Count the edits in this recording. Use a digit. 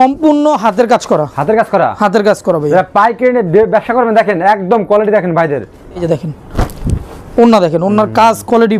1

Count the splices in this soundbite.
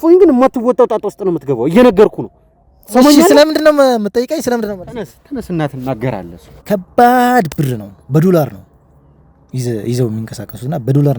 1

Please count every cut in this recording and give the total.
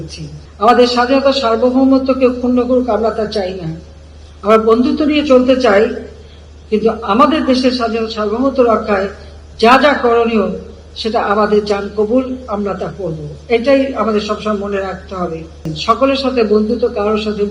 1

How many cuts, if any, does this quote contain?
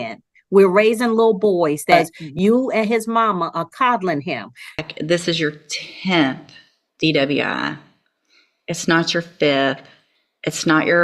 2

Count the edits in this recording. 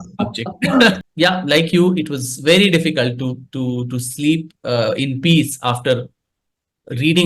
1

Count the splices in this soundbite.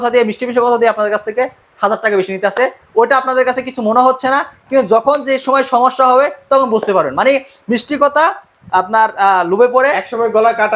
0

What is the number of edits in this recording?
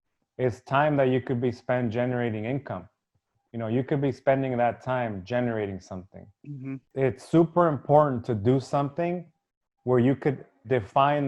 1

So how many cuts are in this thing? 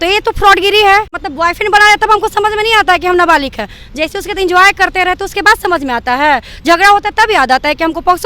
1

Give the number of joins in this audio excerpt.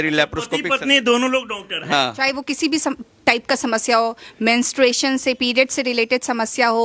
1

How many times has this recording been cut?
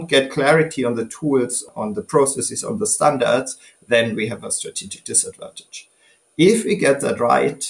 1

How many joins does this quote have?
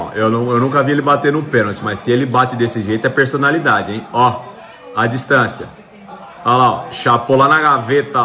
0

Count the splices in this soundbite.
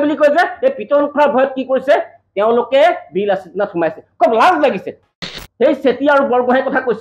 1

